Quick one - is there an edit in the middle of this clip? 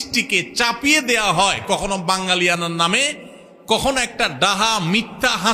no; 0 cuts

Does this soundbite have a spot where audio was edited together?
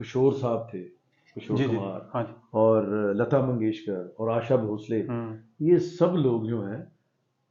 no; 0 cuts

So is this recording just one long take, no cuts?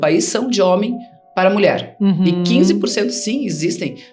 yes; 0 cuts

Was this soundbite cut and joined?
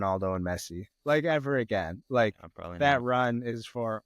no; 0 cuts

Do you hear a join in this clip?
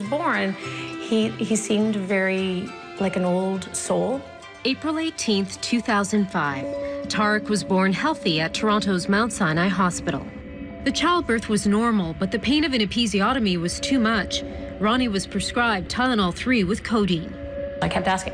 no; 0 cuts

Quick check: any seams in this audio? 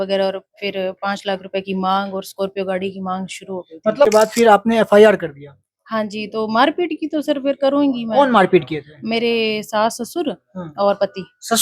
yes; 1 cut; at 4.1 s

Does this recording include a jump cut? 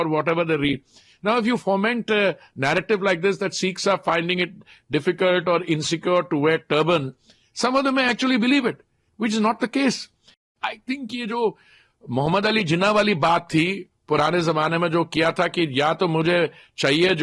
yes; 1 cut; at 10.5 s

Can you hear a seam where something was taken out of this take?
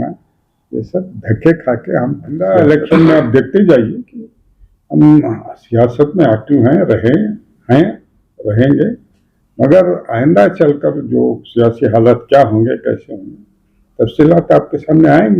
yes; 1 cut; at 2.4 s

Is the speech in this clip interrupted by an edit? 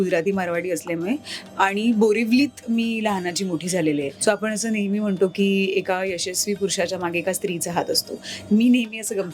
yes; 1 cut; at 4.1 s

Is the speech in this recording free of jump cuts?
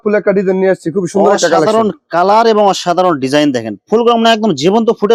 yes; 0 cuts

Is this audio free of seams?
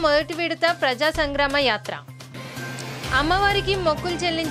yes; 0 cuts

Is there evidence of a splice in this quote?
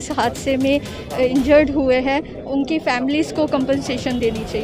no; 0 cuts

